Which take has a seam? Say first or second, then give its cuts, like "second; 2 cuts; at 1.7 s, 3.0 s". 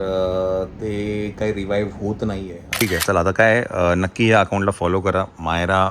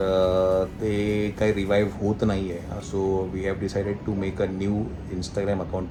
first; 1 cut; at 2.8 s